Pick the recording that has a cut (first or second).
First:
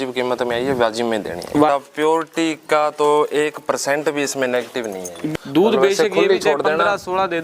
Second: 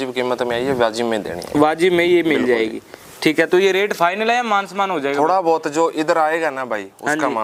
first